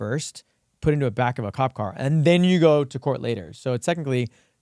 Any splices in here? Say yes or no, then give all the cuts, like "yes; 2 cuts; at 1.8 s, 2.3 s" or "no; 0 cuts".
no; 0 cuts